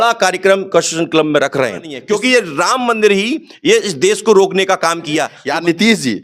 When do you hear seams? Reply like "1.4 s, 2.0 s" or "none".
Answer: 1.9 s, 5.4 s